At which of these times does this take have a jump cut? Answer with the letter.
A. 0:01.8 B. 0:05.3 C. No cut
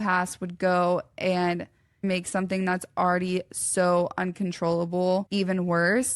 B